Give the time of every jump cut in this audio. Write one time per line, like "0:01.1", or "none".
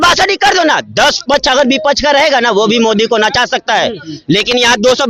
none